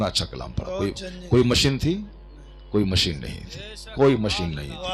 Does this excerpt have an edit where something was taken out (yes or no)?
no